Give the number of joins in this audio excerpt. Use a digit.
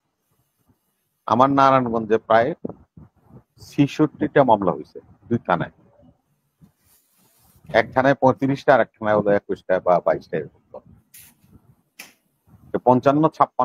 0